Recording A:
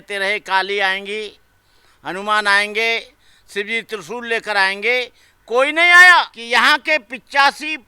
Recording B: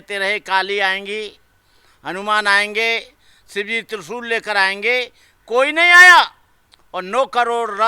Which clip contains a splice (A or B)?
A